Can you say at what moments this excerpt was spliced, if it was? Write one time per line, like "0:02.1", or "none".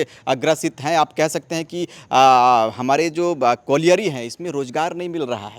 none